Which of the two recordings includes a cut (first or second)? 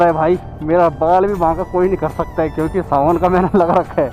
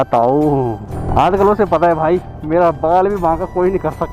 second